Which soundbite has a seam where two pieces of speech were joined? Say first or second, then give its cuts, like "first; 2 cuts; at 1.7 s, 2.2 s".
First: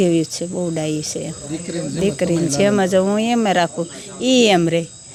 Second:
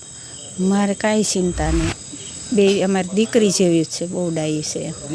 second; 1 cut; at 2.0 s